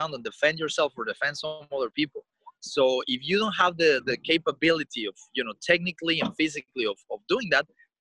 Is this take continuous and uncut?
yes; 0 cuts

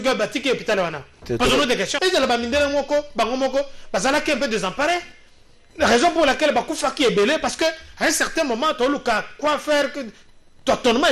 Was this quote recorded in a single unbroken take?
no; 1 cut; at 2.0 s

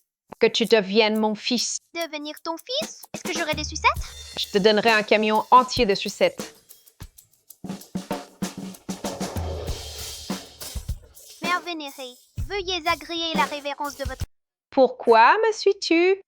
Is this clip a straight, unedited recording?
no; 1 cut; at 14.3 s

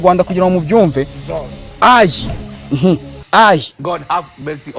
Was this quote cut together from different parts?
yes; 1 cut; at 3.7 s

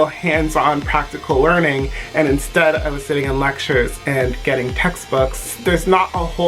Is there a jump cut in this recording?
yes; 1 cut; at 5.5 s

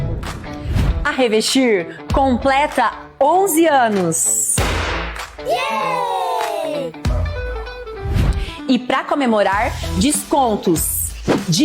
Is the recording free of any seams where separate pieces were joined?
no; 2 cuts; at 1.5 s, 3.5 s

